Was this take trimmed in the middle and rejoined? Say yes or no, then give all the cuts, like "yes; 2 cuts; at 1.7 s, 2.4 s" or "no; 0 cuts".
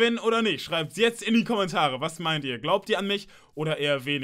no; 0 cuts